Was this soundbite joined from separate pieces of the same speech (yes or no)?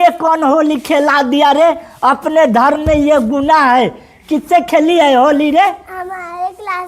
no